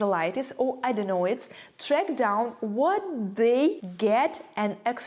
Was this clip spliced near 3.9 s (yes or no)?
yes